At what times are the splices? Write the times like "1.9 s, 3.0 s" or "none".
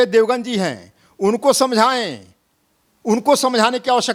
none